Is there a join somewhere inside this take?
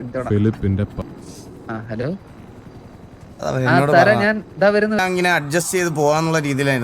yes; 1 cut; at 5.0 s

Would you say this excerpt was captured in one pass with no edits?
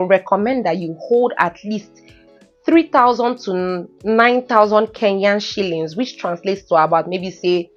yes; 0 cuts

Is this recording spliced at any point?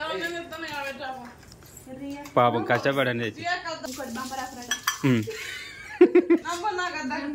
yes; 2 cuts; at 3.8 s, 6.4 s

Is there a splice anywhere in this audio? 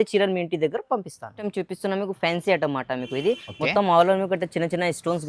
no; 0 cuts

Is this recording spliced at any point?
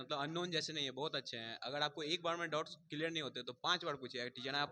no; 0 cuts

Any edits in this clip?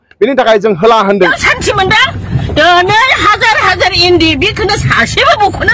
yes; 1 cut; at 1.3 s

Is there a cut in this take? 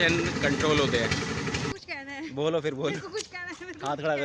yes; 1 cut; at 1.7 s

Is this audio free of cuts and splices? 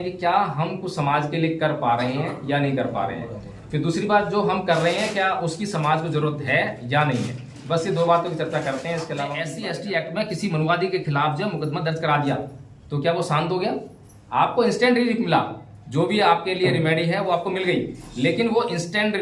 no; 1 cut; at 9.5 s

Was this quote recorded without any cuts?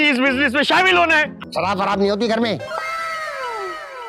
no; 1 cut; at 1.4 s

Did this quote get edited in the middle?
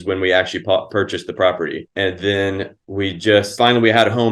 yes; 3 cuts; at 1.8 s, 2.7 s, 3.5 s

